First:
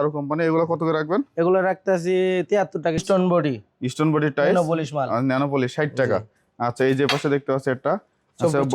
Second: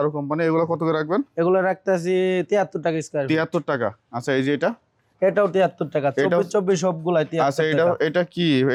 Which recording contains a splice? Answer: first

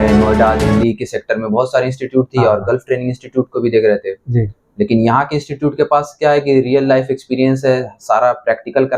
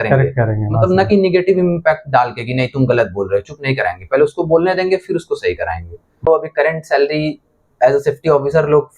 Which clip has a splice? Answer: second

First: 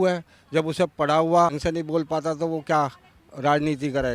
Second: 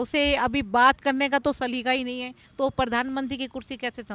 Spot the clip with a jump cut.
first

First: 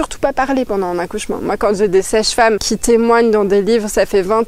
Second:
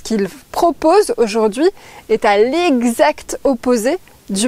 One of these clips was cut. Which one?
first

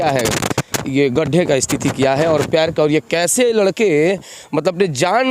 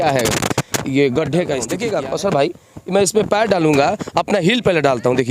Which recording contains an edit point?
second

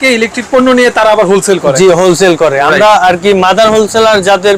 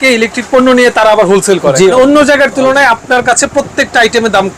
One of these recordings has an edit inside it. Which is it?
second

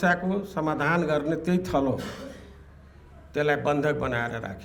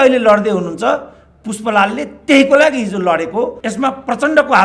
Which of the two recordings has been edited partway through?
second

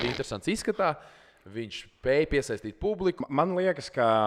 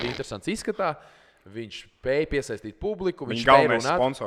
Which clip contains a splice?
first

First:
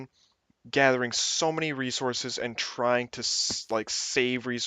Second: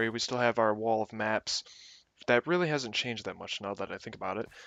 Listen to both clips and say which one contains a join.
first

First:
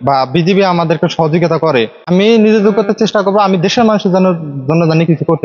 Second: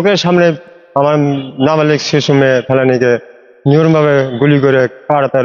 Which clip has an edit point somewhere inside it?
first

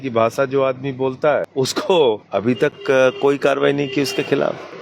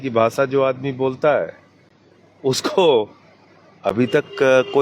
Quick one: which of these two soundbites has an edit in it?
first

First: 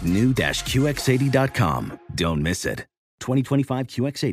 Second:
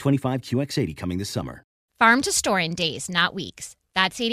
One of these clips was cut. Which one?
second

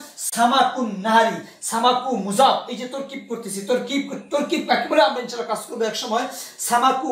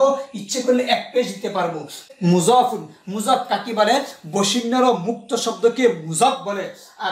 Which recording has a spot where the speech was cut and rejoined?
second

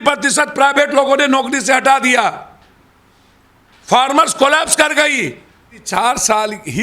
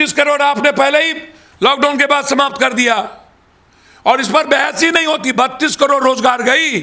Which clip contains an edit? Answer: first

